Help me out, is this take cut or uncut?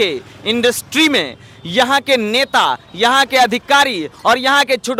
uncut